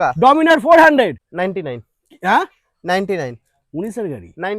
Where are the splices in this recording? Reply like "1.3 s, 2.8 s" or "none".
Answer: 1.2 s